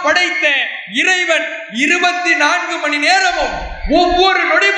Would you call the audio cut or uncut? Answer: uncut